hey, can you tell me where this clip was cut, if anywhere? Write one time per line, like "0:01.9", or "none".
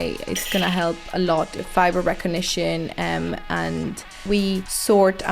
0:01.6
0:04.2